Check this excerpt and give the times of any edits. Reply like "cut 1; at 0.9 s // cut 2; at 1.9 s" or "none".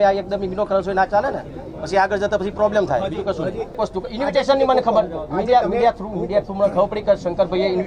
cut 1; at 3.8 s